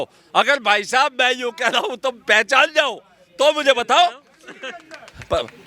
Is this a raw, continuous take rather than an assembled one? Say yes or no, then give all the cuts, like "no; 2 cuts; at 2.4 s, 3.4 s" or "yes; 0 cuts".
yes; 0 cuts